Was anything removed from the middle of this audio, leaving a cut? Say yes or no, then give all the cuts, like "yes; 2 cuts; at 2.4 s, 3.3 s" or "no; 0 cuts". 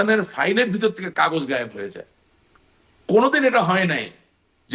no; 0 cuts